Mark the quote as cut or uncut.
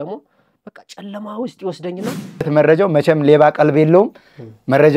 cut